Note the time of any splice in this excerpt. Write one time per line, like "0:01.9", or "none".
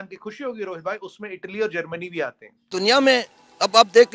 0:02.7